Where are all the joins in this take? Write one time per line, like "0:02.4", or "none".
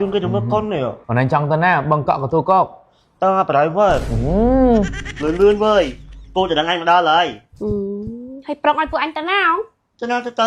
0:01.0
0:05.0